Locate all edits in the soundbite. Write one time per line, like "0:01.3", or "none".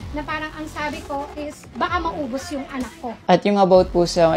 0:03.2